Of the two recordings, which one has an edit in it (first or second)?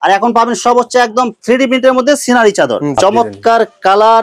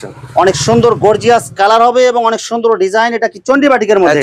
first